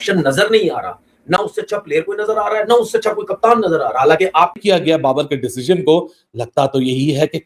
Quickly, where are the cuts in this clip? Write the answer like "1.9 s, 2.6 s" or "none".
4.6 s